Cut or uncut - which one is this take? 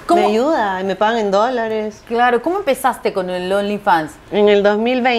uncut